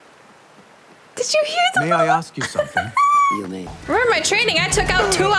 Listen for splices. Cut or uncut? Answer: cut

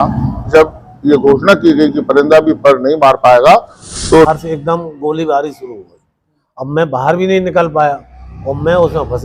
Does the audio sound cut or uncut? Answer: cut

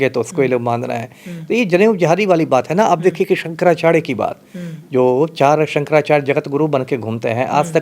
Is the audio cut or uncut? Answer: uncut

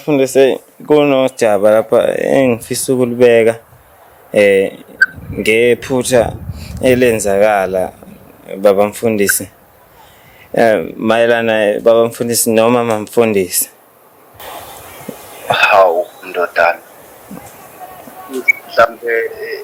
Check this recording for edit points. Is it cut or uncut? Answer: uncut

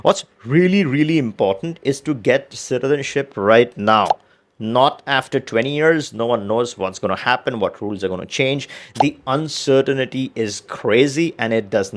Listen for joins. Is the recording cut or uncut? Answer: uncut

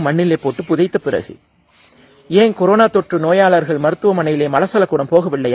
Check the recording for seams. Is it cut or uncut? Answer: uncut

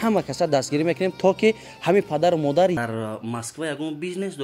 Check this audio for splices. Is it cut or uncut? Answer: cut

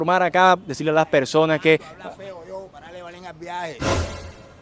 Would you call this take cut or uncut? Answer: uncut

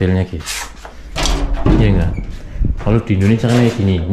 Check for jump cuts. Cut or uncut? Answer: uncut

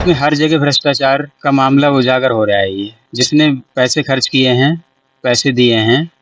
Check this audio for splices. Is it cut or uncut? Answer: cut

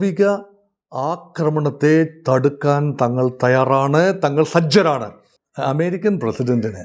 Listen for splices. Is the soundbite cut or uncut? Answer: cut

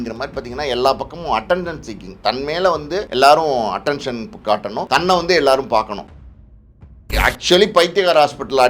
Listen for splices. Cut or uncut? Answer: cut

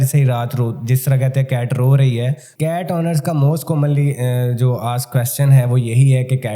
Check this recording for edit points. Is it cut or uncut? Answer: cut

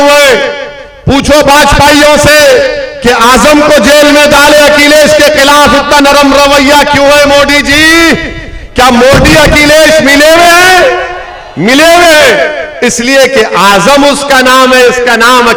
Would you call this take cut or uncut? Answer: uncut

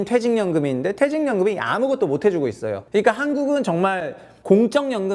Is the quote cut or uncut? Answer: uncut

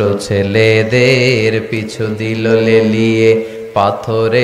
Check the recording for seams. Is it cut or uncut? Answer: uncut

